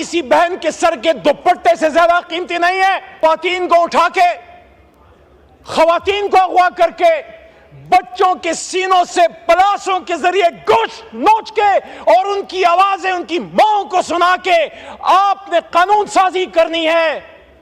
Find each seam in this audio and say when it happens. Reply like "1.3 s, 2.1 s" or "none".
3.2 s